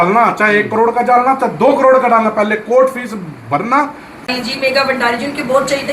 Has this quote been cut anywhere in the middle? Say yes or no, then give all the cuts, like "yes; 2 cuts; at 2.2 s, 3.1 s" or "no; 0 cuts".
yes; 1 cut; at 4.2 s